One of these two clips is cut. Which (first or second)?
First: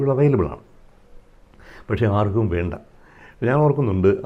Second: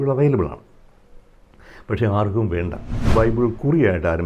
second